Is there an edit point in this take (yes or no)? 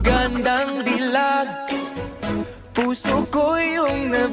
no